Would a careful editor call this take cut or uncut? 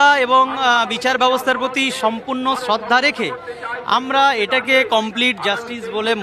uncut